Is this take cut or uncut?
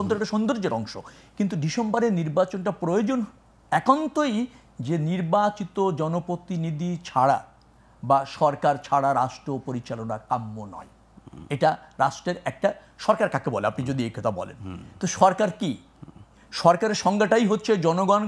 uncut